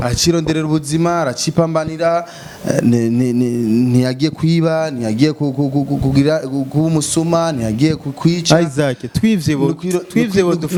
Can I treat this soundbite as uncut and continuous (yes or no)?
yes